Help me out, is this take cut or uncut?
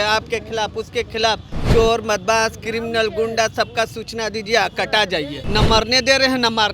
cut